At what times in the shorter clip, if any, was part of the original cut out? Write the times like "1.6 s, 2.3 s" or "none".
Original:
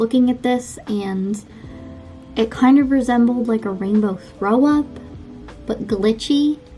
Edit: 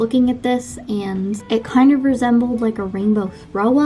1.4 s

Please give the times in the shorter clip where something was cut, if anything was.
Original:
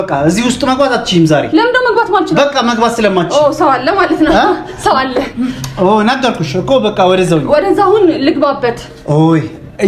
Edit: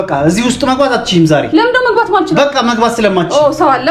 none

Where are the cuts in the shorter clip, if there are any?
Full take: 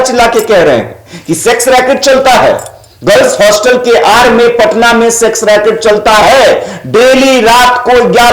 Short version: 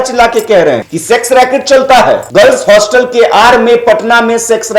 0.9 s, 2.2 s

